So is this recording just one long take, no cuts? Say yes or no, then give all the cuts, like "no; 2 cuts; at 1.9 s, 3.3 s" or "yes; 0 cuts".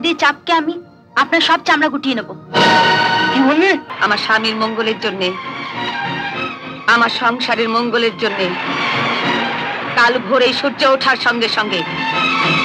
no; 1 cut; at 3.9 s